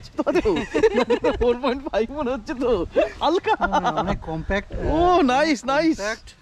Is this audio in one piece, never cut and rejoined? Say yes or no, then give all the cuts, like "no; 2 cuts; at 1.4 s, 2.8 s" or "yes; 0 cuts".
yes; 0 cuts